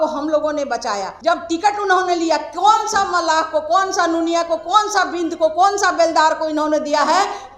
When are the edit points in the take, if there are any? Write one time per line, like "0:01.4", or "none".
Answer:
0:01.1